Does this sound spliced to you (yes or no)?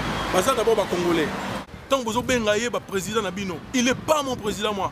yes